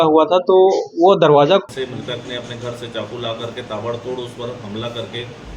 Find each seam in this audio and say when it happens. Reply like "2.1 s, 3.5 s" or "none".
1.6 s